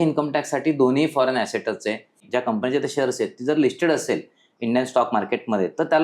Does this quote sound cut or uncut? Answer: cut